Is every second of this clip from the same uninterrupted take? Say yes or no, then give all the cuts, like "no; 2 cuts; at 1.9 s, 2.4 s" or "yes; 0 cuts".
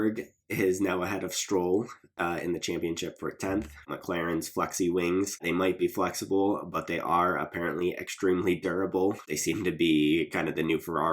no; 3 cuts; at 3.9 s, 5.4 s, 9.2 s